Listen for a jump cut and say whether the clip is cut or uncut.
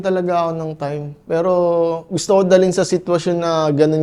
uncut